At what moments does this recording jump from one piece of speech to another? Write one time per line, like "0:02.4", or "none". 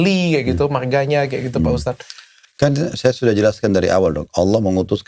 none